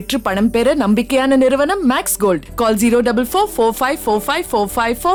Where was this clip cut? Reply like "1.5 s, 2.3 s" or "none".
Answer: none